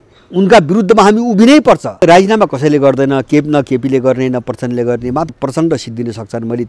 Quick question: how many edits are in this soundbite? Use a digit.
2